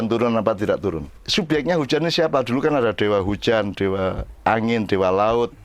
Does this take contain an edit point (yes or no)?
yes